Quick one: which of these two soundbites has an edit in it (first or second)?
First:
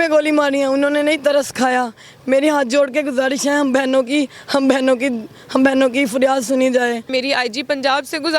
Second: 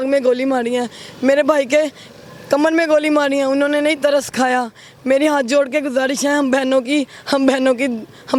first